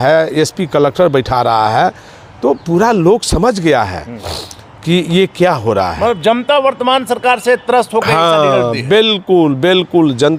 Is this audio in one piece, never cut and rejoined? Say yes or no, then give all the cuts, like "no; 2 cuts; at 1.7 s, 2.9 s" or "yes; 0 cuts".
yes; 0 cuts